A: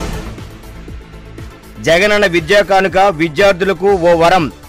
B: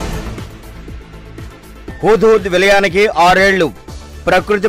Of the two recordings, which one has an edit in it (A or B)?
B